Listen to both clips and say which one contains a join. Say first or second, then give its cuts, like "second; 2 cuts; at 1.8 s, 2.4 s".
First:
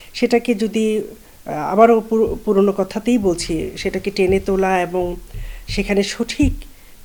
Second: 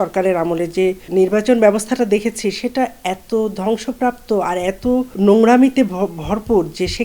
second; 2 cuts; at 1.0 s, 5.1 s